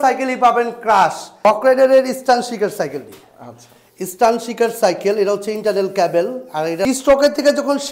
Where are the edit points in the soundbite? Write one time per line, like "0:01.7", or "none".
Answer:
0:01.3
0:06.8